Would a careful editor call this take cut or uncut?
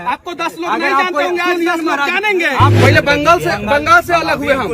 cut